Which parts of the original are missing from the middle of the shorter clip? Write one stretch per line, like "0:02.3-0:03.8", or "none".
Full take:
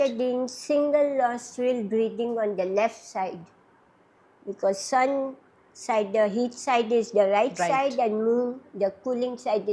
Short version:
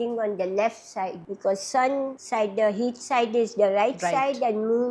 0:03.4-0:04.4
0:05.4-0:05.7